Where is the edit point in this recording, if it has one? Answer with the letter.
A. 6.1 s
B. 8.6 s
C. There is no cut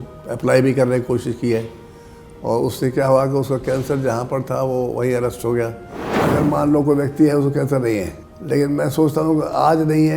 A